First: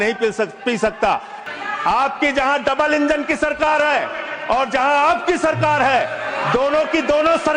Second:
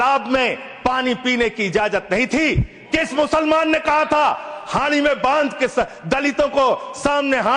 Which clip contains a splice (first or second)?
first